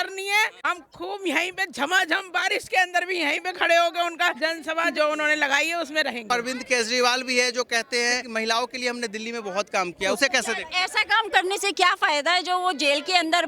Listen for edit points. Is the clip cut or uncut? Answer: cut